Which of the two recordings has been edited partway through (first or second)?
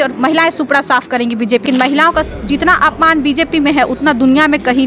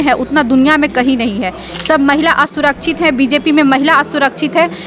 first